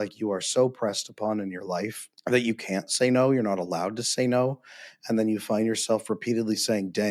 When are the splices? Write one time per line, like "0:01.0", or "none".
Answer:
0:02.1